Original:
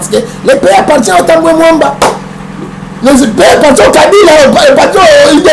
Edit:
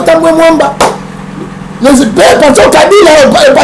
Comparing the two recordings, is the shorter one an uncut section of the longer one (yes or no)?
yes